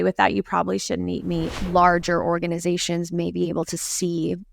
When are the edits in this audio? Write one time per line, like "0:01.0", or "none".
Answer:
0:01.6